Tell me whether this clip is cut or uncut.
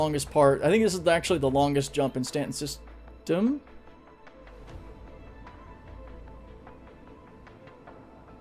uncut